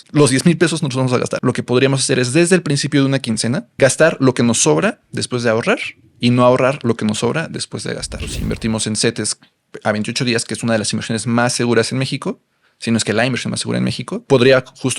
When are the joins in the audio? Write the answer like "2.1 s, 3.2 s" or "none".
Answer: 1.3 s, 3.7 s, 8.3 s, 14.2 s